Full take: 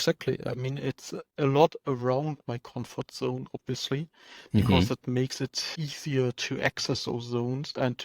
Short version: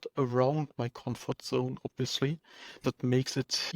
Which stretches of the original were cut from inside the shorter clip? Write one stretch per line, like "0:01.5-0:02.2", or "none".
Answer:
0:04.5-0:04.9